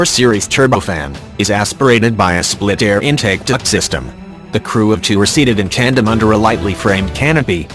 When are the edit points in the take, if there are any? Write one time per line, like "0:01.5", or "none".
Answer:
0:06.1